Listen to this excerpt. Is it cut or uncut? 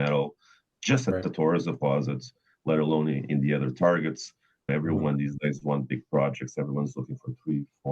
cut